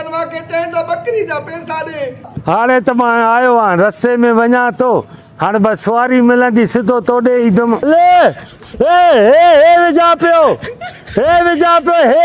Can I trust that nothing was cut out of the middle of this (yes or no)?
no